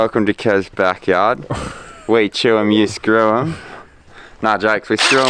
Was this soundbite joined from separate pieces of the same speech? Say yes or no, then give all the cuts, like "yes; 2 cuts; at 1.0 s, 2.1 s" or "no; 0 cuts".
no; 0 cuts